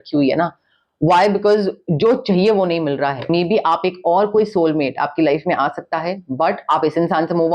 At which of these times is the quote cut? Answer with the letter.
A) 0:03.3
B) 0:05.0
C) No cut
A